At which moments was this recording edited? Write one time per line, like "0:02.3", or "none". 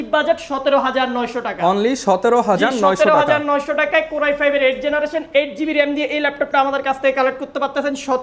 none

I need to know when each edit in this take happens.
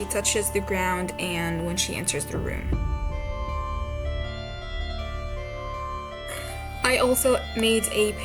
none

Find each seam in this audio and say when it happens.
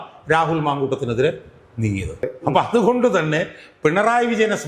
0:02.3

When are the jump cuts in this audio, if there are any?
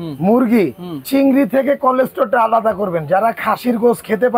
0:01.0

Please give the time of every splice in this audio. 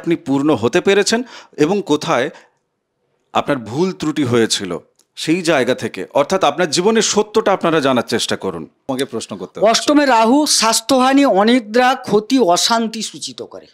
0:08.9

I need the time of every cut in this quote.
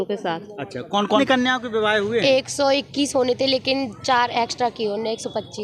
0:01.2

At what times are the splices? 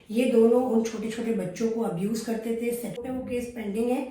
0:03.0

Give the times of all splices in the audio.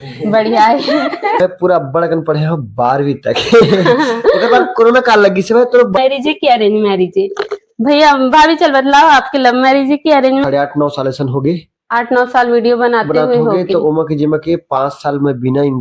0:01.4
0:06.0
0:10.4

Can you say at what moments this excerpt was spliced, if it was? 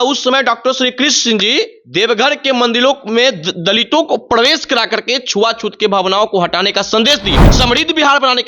0:01.8
0:07.4

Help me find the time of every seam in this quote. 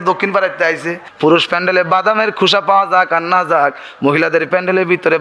0:01.0

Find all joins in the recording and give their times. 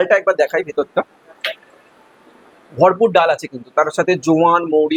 none

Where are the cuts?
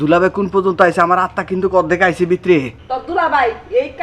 0:02.8

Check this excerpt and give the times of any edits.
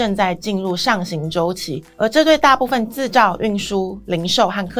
0:01.8

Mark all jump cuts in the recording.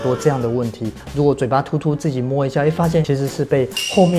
0:01.0
0:03.0

